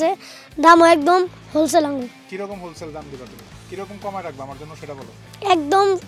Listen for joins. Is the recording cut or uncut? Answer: uncut